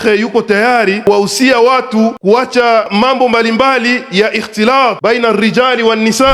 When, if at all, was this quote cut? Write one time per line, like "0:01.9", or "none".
0:01.0
0:02.2
0:02.9
0:05.0

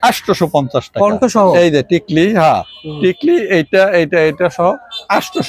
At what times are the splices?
none

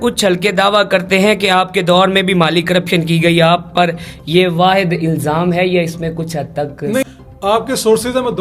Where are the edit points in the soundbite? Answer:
0:07.0

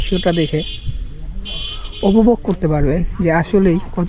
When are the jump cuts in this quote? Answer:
none

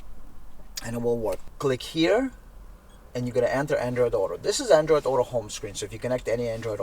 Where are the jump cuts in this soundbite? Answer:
0:01.4

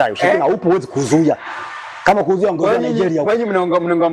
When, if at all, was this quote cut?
none

